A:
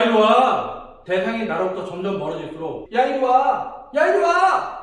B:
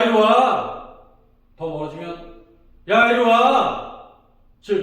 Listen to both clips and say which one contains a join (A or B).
A